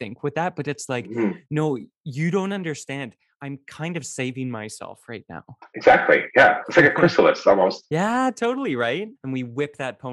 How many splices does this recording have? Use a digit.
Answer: 1